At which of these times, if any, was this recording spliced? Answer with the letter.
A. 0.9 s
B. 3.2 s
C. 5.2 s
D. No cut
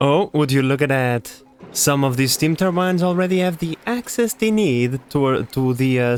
D